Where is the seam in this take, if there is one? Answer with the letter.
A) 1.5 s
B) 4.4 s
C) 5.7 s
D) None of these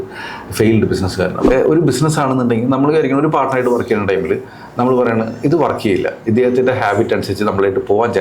A